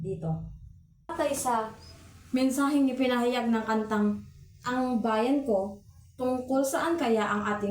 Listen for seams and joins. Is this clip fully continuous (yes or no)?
no